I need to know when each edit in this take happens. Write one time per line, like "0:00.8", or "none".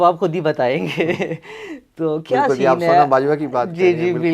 none